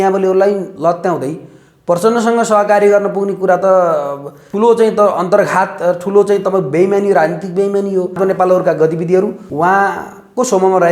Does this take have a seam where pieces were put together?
yes; 3 cuts; at 4.4 s, 8.2 s, 9.4 s

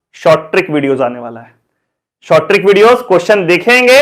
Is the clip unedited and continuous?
yes; 0 cuts

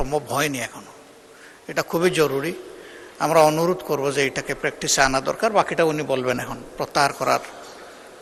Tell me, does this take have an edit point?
no; 0 cuts

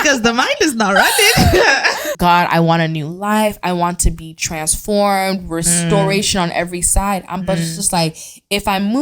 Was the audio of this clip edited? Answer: yes; 1 cut; at 2.0 s

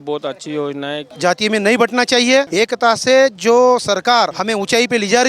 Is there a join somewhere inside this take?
yes; 3 cuts; at 1.0 s, 2.5 s, 4.4 s

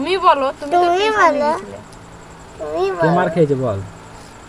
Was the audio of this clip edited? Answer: no; 0 cuts

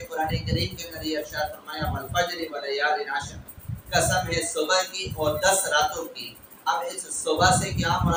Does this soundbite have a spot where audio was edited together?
no; 0 cuts

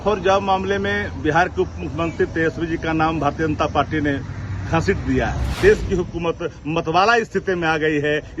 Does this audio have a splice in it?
yes; 1 cut; at 5.5 s

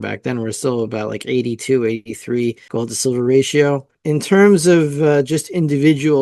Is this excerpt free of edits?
no; 2 cuts; at 2.6 s, 3.9 s

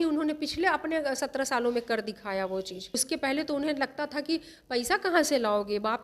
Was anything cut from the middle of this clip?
yes; 1 cut; at 2.9 s

